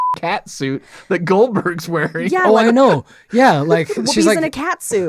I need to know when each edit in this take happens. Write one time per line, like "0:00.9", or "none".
none